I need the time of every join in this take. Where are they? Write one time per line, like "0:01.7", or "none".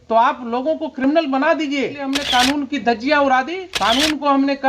0:02.1
0:03.6